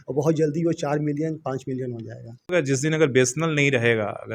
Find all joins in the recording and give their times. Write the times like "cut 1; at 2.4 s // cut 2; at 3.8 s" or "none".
cut 1; at 2.6 s